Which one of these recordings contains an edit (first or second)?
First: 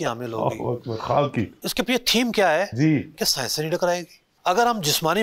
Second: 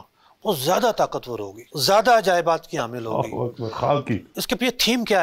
first